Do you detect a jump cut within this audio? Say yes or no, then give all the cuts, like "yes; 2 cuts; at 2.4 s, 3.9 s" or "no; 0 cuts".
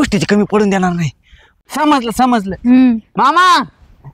yes; 1 cut; at 1.6 s